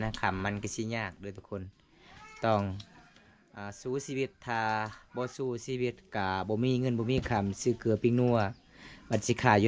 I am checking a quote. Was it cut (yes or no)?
no